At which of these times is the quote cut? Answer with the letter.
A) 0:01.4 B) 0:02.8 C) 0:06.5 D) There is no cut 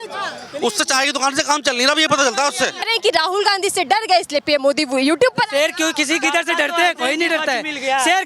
B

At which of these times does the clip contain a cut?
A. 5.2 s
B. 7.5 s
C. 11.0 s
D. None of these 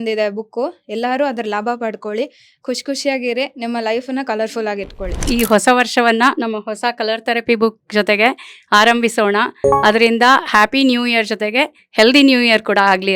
A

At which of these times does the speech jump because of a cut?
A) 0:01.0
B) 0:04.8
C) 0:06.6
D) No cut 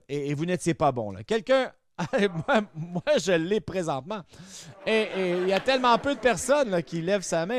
D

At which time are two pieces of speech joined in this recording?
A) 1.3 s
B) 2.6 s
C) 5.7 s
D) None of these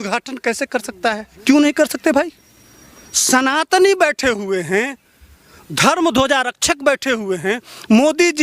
A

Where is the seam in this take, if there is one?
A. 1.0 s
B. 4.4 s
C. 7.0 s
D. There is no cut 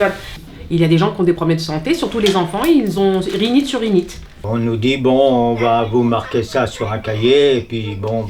B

